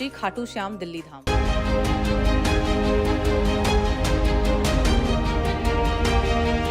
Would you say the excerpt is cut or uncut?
uncut